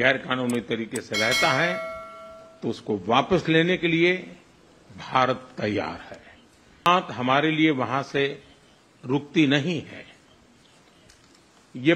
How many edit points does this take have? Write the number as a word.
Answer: one